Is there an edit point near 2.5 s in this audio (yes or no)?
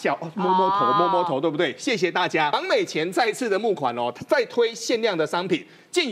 yes